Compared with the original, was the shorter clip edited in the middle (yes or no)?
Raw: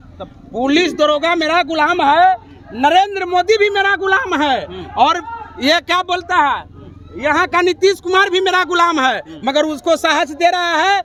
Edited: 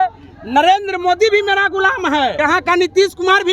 yes